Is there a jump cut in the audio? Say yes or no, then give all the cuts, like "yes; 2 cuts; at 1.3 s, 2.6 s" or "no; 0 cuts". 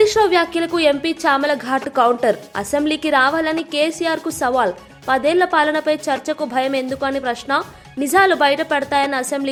no; 0 cuts